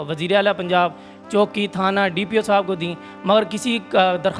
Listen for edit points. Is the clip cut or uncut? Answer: uncut